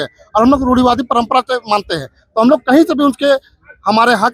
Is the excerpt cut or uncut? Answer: uncut